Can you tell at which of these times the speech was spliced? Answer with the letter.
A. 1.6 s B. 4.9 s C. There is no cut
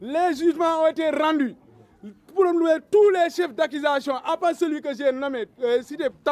C